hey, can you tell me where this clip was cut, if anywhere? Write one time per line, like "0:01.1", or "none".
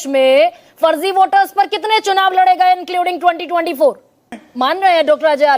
0:04.4